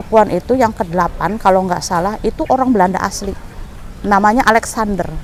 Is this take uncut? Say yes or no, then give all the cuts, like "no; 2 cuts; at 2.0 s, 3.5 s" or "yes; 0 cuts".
yes; 0 cuts